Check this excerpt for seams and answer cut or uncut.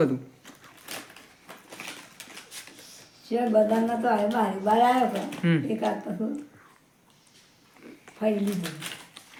uncut